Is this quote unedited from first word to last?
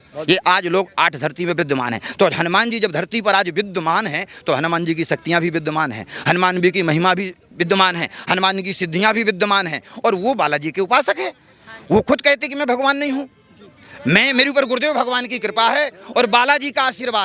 yes; 0 cuts

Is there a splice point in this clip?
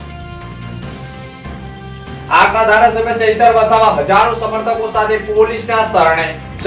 yes; 2 cuts; at 0.9 s, 2.3 s

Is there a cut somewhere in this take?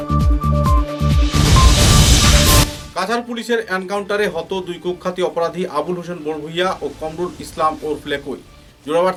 no; 0 cuts

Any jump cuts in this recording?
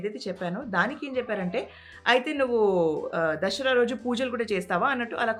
no; 0 cuts

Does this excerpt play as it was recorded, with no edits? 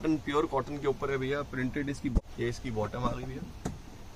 no; 1 cut; at 2.1 s

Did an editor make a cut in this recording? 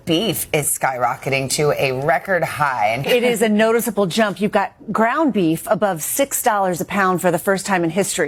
no; 0 cuts

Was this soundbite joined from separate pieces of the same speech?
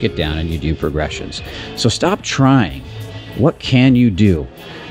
no; 0 cuts

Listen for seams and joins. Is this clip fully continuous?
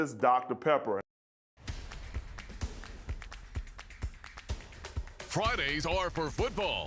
no; 1 cut; at 1.0 s

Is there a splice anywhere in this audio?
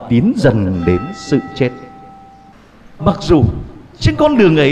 no; 0 cuts

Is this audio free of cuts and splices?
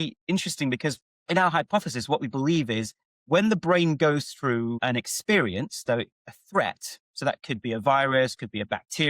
no; 2 cuts; at 1.1 s, 4.8 s

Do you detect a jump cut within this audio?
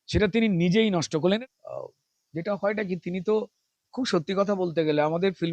yes; 1 cut; at 1.2 s

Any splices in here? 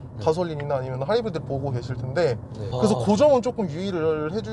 yes; 1 cut; at 2.7 s

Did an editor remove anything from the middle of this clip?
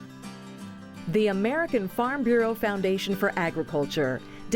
yes; 1 cut; at 1.0 s

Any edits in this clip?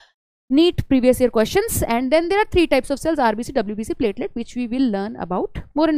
no; 0 cuts

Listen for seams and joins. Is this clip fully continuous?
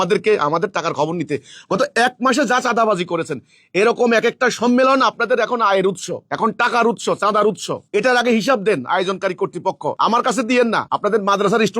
no; 2 cuts; at 9.9 s, 10.9 s

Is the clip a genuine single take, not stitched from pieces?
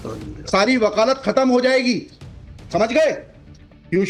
yes; 0 cuts

